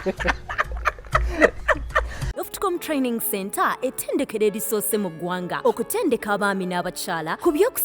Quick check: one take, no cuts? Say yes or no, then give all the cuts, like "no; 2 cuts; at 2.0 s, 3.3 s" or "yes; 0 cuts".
no; 1 cut; at 2.2 s